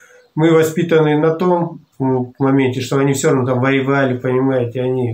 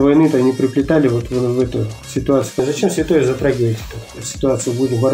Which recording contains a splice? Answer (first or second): second